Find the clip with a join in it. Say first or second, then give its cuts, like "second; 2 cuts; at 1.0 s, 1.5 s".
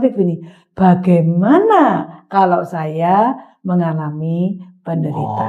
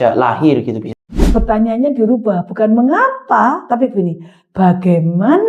second; 1 cut; at 1.2 s